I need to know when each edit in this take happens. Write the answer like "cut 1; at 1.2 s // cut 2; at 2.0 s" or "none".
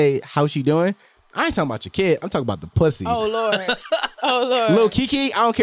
none